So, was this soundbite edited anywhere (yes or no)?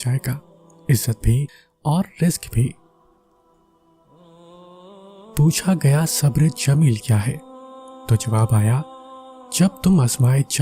yes